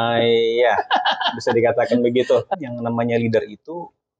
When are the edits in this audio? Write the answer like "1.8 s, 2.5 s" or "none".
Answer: 2.5 s